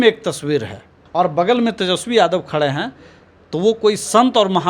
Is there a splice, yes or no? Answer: yes